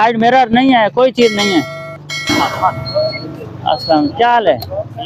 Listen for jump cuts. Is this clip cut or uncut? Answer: uncut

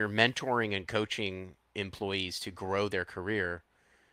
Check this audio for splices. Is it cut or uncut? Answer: uncut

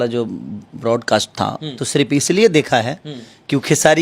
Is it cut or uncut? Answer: cut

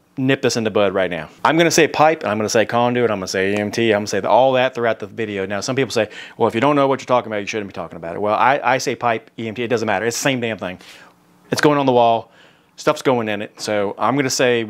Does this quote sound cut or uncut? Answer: cut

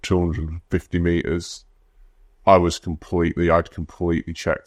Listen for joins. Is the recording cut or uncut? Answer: uncut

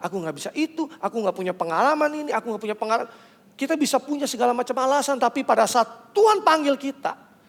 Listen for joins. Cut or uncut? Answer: uncut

